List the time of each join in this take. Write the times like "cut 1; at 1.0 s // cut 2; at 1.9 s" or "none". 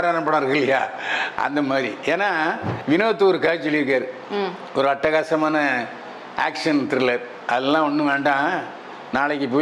cut 1; at 2.7 s